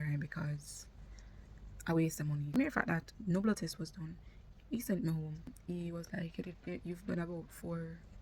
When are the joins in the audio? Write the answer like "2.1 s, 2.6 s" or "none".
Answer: 2.5 s, 5.5 s